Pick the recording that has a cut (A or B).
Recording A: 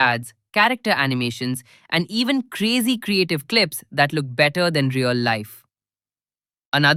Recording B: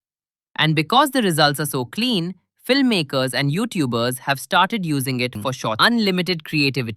B